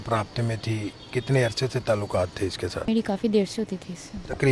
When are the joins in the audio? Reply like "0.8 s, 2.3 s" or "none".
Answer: 2.9 s